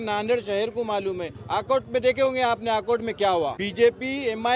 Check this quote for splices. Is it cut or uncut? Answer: cut